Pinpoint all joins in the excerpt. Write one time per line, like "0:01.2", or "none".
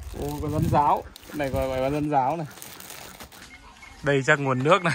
0:03.4